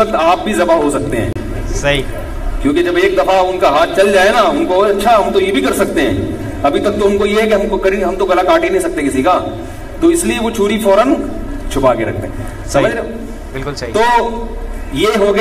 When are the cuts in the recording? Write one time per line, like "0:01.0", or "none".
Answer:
none